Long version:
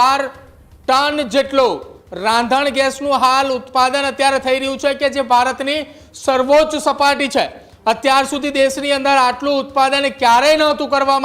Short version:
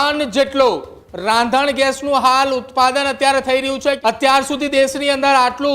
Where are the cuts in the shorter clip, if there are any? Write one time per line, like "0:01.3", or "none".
0:04.0